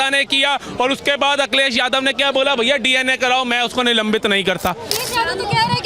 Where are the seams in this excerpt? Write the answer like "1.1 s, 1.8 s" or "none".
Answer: 5.0 s

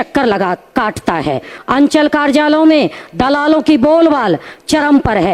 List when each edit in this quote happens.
1.5 s

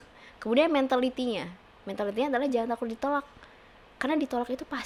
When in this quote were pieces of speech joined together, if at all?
none

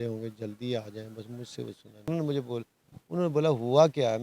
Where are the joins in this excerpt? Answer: 2.1 s

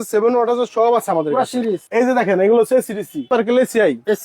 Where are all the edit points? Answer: 1.8 s, 3.2 s

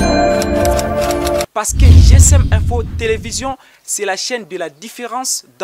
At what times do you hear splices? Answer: 1.4 s

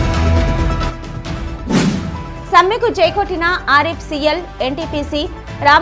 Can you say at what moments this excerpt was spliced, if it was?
1.9 s

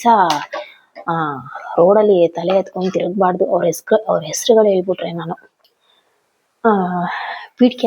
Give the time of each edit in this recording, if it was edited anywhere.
5.5 s

